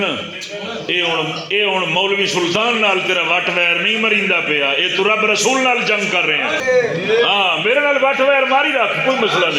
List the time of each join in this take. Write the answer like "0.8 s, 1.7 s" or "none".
6.6 s